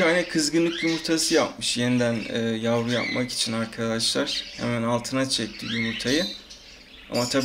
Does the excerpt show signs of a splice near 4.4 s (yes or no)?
no